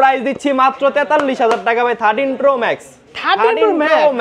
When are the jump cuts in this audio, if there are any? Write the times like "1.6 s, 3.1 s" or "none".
none